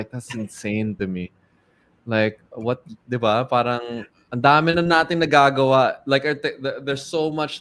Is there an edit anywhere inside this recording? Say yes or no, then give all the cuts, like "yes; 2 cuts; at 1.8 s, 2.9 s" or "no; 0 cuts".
no; 0 cuts